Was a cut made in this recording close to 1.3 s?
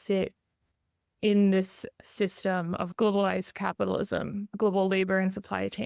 no; 2 cuts; at 2.9 s, 4.5 s

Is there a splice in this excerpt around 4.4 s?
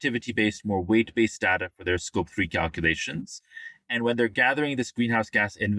no; 0 cuts

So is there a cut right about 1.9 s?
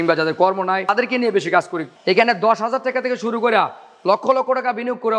yes; 2 cuts; at 0.9 s, 1.9 s

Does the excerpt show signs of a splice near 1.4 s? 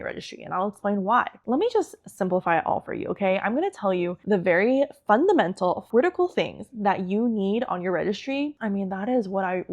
yes; 4 cuts; at 1.4 s, 4.2 s, 5.8 s, 8.6 s

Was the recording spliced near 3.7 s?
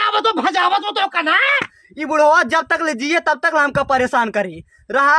no; 1 cut; at 1.6 s

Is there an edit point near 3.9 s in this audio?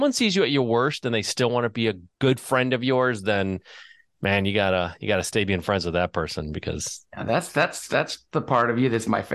no; 1 cut; at 2.1 s

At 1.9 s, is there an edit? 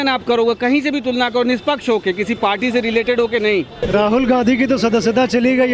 no; 1 cut; at 3.8 s

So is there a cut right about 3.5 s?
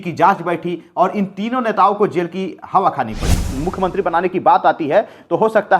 yes; 1 cut; at 3.5 s

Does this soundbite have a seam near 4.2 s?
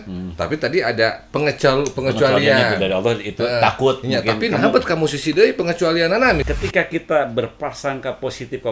no; 1 cut; at 6.4 s

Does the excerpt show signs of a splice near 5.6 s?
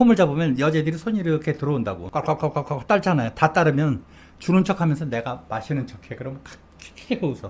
no; 1 cut; at 2.0 s

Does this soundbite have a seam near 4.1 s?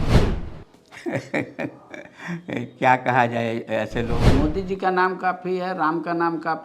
yes; 1 cut; at 4.1 s

